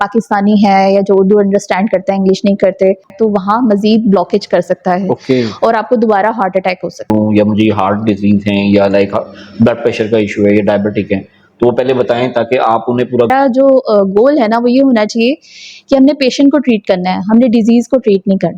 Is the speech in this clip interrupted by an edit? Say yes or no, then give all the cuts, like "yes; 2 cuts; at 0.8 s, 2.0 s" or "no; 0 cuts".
yes; 3 cuts; at 3.1 s, 7.0 s, 13.3 s